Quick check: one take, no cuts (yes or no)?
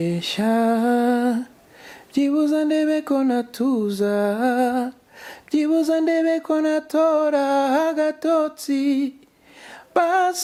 yes